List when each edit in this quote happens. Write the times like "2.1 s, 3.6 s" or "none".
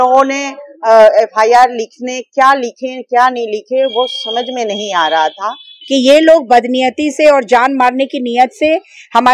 5.7 s